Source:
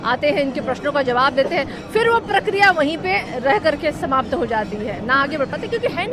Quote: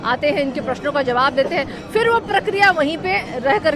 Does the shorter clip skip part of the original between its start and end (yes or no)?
no